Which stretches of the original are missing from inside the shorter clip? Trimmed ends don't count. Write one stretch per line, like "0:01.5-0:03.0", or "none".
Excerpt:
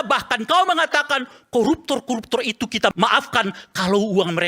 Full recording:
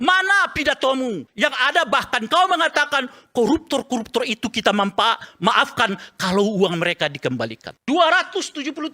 0:04.7-0:05.4